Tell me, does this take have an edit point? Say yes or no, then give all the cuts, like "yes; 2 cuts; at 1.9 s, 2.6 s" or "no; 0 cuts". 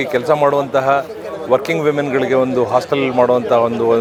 no; 0 cuts